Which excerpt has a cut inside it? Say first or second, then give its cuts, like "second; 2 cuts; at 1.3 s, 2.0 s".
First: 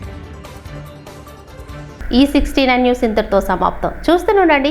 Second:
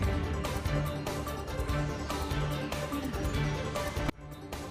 second; 1 cut; at 2.0 s